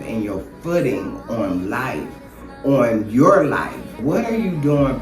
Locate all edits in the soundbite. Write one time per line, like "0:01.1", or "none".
0:04.0